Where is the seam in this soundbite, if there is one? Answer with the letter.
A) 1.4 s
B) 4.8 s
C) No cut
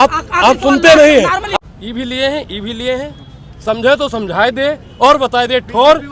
A